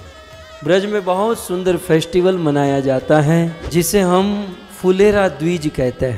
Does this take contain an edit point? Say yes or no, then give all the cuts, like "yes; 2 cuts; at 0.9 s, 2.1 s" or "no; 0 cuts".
yes; 1 cut; at 3.6 s